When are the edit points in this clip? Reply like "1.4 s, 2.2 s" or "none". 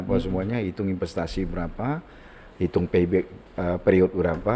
none